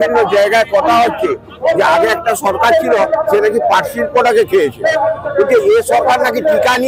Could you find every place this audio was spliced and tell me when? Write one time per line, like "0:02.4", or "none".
none